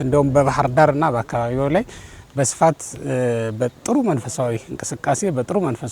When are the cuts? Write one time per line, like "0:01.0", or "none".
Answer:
none